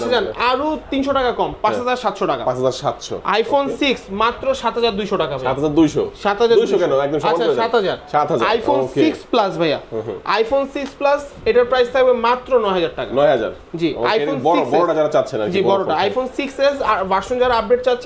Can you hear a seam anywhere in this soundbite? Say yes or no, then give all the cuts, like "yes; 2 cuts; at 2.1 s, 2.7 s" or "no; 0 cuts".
no; 0 cuts